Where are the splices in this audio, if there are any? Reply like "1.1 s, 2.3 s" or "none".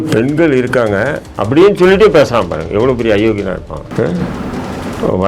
3.9 s